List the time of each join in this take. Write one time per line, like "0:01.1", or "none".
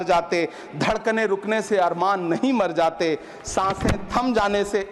none